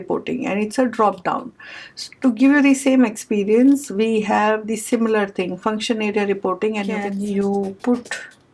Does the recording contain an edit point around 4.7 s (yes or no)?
no